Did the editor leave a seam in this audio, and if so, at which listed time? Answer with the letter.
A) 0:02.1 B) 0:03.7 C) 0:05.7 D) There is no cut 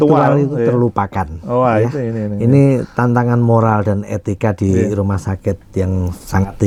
D